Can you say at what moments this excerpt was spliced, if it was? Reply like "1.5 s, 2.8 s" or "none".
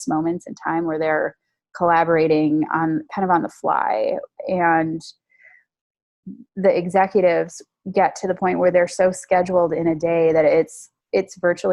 none